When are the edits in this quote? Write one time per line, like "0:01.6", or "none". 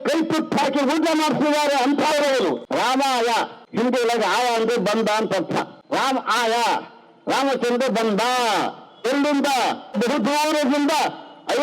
0:02.6
0:03.6
0:05.8
0:10.0